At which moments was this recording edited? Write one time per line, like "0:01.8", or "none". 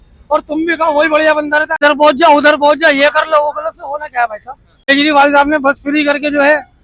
0:01.8
0:04.9